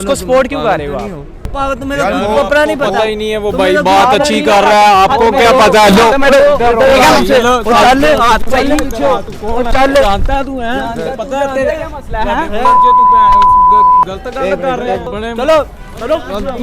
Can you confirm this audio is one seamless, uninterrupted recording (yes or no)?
no